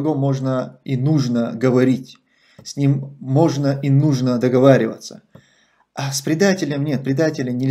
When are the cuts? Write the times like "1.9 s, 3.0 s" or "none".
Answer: none